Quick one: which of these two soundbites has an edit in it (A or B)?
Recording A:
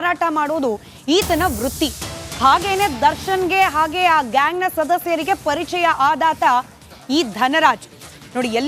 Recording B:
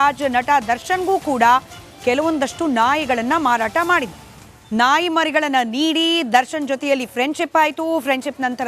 B